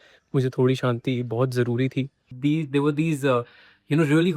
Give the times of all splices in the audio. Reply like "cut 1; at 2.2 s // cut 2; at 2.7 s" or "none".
cut 1; at 2.2 s